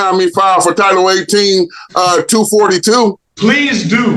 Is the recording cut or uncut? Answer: cut